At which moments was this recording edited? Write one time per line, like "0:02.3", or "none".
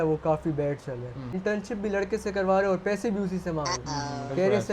0:01.3